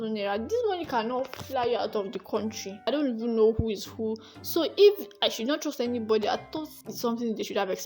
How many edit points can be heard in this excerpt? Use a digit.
1